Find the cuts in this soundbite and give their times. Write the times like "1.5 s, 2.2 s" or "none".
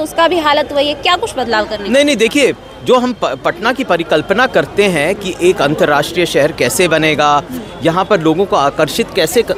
none